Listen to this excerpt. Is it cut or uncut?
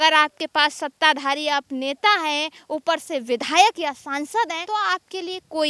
uncut